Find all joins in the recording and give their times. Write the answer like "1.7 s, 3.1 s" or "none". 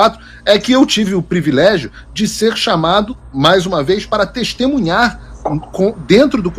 none